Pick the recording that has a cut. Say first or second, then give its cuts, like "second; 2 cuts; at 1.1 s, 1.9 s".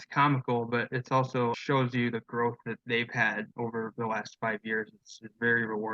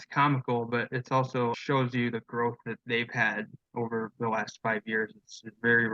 first; 1 cut; at 3.8 s